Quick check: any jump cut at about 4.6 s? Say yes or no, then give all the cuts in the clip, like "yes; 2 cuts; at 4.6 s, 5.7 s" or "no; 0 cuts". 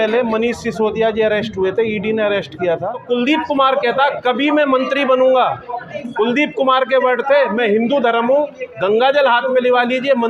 no; 1 cut; at 3.0 s